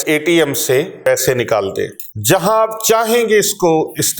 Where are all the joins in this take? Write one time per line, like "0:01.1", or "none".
0:01.1
0:02.1